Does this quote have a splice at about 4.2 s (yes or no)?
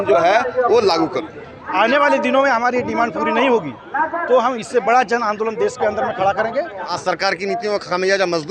no